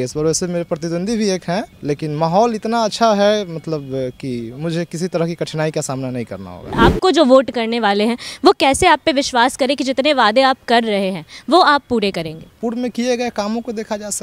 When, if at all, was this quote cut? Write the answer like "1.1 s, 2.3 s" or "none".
1.7 s, 6.7 s, 12.4 s